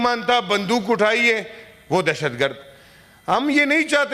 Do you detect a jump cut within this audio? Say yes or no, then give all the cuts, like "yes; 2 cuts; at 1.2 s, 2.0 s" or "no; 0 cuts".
no; 0 cuts